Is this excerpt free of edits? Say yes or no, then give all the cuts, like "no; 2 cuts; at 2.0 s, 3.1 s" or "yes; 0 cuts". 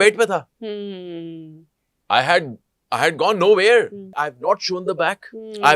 no; 1 cut; at 4.2 s